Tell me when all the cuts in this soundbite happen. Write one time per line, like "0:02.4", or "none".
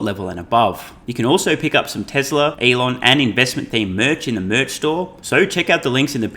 0:01.0
0:02.6
0:05.2